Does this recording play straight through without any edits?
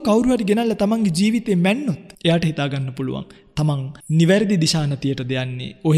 no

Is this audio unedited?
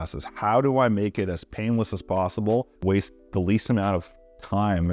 no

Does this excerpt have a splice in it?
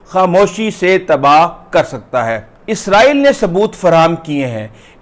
yes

